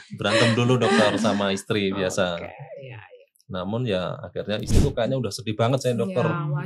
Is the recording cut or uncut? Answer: cut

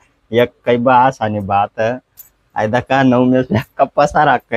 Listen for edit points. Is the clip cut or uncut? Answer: uncut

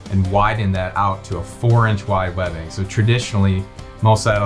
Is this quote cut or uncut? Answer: uncut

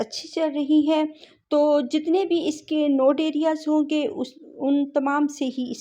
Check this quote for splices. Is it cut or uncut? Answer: uncut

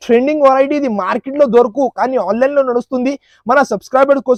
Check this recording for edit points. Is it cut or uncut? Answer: uncut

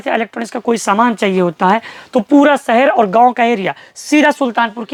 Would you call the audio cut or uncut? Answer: uncut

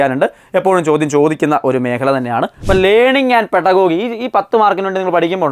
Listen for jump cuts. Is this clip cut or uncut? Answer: cut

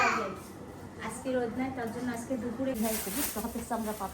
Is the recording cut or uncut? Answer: cut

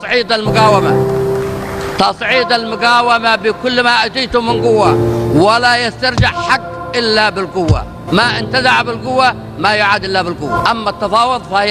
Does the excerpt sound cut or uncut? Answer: cut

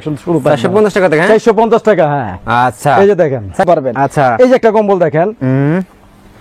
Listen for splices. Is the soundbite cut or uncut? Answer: cut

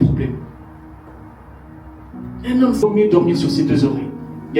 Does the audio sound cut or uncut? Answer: cut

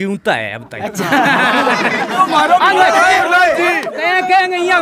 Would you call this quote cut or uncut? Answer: cut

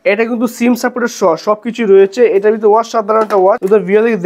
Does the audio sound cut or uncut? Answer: uncut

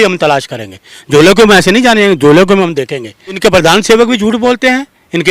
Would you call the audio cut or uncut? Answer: cut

